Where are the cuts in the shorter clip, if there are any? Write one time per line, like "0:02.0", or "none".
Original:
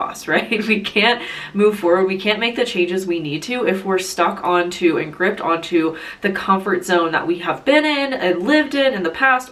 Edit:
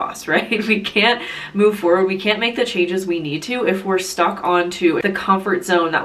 0:05.0